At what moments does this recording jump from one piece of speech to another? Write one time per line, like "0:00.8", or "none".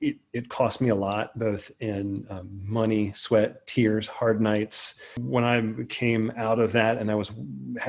0:05.1